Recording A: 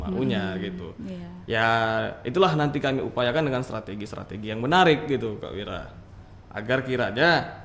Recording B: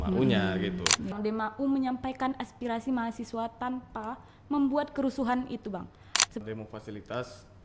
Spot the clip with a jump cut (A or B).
B